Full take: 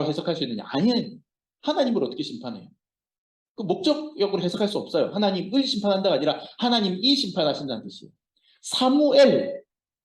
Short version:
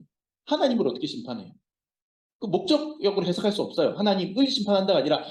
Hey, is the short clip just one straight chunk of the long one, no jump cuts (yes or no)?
yes